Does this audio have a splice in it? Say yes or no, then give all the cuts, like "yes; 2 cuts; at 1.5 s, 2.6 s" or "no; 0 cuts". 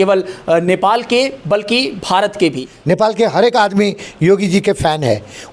yes; 1 cut; at 2.7 s